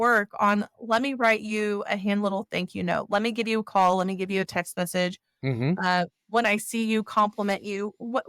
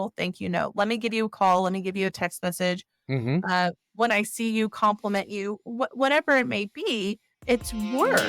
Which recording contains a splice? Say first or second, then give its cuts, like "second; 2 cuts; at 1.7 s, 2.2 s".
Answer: second; 1 cut; at 7.3 s